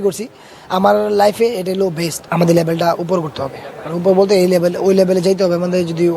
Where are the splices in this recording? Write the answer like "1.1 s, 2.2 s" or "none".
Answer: 2.2 s